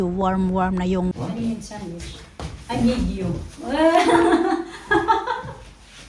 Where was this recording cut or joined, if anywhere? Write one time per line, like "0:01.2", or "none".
0:01.1